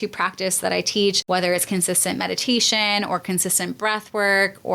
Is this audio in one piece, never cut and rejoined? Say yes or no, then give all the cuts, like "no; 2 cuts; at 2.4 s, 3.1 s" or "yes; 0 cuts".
no; 1 cut; at 1.2 s